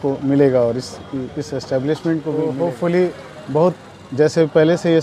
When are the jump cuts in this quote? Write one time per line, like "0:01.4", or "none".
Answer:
0:02.5